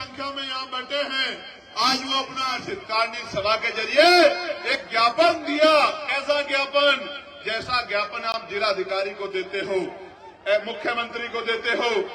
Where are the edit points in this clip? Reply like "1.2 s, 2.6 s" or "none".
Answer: 2.5 s